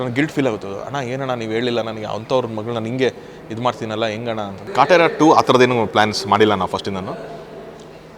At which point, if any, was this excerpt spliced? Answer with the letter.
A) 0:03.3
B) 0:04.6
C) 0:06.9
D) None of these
B